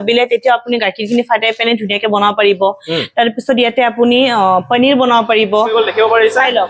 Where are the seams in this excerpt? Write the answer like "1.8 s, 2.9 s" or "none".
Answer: 5.7 s